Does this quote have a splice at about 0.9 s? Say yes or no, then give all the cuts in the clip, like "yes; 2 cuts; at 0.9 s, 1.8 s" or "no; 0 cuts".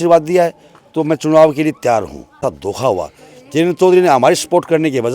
no; 1 cut; at 2.4 s